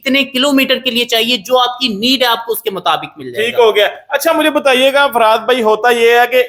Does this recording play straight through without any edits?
yes; 0 cuts

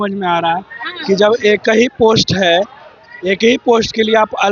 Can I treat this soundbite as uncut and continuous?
yes; 0 cuts

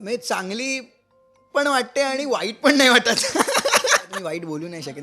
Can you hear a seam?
yes; 1 cut; at 4.1 s

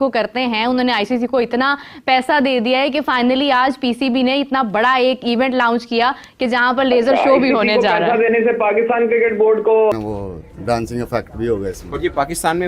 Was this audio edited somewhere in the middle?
yes; 1 cut; at 9.9 s

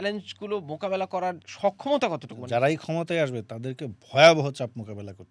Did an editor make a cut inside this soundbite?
yes; 2 cuts; at 1.5 s, 2.3 s

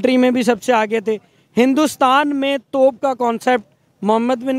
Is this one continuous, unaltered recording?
yes; 0 cuts

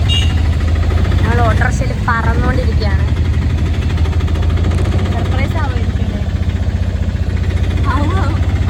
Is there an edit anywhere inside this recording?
no; 0 cuts

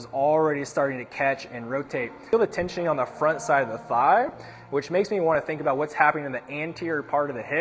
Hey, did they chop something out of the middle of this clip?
yes; 1 cut; at 2.3 s

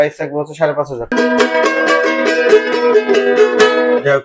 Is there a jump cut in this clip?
yes; 1 cut; at 1.1 s

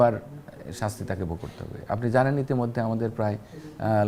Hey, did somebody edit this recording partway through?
no; 0 cuts

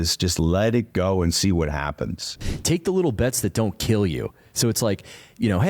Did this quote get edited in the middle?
yes; 1 cut; at 2.4 s

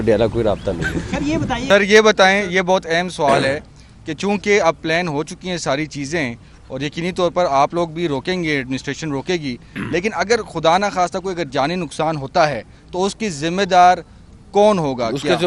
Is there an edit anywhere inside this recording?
yes; 1 cut; at 1.6 s

